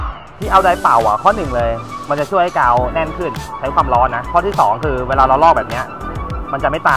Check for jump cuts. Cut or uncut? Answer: uncut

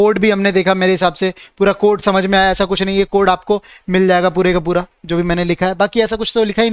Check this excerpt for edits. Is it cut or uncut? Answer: uncut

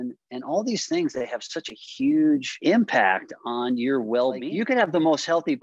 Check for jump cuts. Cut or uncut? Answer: cut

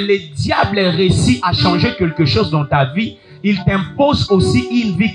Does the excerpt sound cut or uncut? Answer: uncut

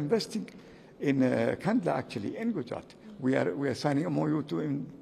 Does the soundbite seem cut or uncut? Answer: uncut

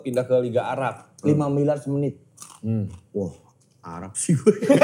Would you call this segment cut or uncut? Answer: uncut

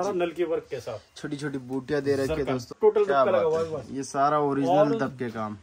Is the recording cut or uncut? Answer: cut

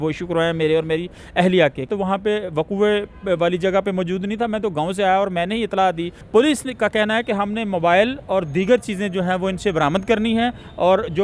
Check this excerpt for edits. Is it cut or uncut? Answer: cut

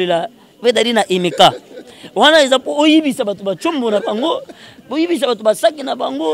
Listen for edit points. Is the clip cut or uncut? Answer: uncut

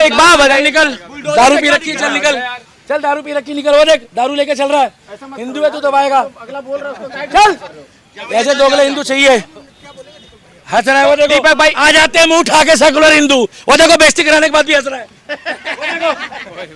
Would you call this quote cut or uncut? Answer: uncut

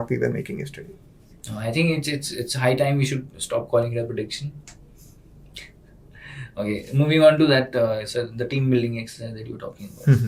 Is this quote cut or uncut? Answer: uncut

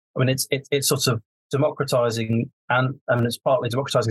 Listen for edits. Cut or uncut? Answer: cut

